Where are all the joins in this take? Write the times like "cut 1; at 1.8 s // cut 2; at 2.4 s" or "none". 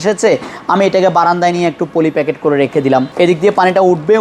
cut 1; at 3.1 s